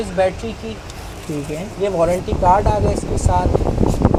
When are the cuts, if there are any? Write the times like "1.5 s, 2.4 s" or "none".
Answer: none